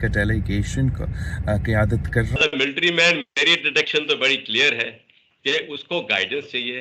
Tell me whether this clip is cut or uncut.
cut